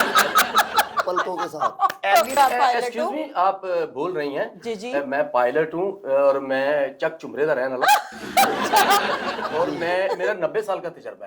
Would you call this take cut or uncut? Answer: cut